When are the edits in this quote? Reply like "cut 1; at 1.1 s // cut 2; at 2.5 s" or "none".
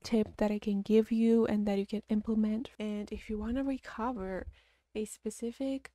cut 1; at 2.7 s